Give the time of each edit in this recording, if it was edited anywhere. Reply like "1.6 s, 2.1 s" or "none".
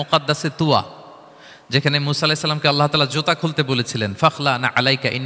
none